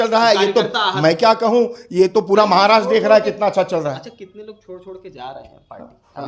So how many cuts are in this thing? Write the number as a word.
zero